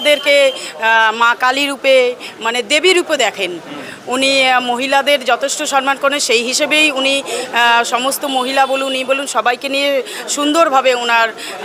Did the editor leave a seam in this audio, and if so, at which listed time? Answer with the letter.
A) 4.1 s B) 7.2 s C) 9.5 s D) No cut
D